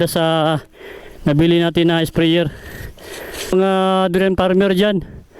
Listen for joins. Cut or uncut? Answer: cut